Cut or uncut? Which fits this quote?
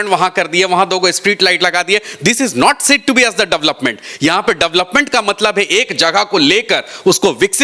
uncut